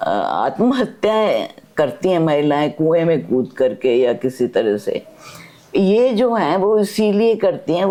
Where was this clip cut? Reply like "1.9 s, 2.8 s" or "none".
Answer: none